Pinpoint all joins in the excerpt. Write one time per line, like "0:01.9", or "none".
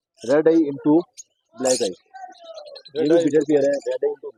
none